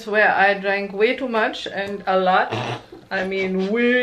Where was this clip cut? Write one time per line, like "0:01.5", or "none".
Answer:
none